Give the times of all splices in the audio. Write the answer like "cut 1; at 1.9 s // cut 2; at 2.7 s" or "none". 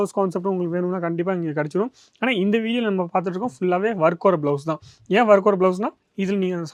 none